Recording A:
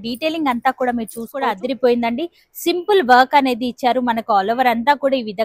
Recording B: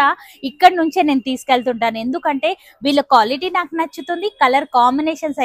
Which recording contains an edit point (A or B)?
A